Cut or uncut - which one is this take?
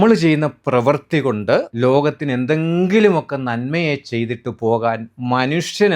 cut